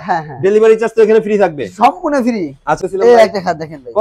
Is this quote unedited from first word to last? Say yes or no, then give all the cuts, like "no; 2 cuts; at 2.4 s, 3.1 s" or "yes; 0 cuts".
no; 1 cut; at 2.8 s